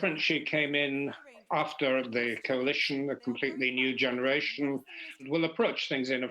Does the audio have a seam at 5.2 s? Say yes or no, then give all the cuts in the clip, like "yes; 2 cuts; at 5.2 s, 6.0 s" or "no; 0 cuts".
yes; 1 cut; at 5.2 s